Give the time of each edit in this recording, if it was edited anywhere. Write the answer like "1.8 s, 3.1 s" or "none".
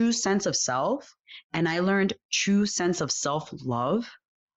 none